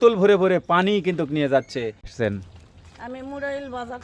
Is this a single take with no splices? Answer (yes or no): no